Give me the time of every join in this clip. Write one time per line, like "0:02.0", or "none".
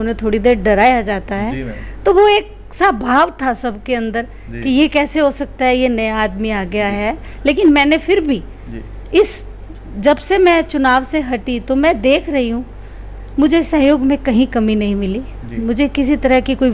none